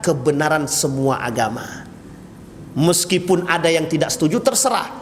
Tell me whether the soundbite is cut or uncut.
uncut